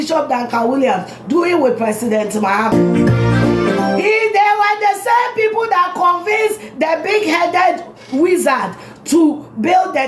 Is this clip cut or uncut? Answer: cut